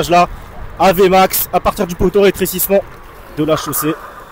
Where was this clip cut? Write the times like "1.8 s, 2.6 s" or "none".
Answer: none